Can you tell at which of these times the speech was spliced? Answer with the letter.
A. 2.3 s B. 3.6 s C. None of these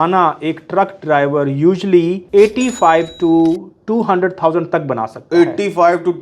C